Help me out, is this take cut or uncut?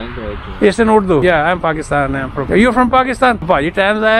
cut